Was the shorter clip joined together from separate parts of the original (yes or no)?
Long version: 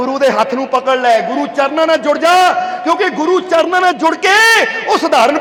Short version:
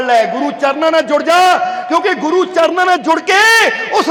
no